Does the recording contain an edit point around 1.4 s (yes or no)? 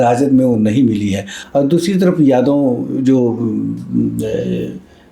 no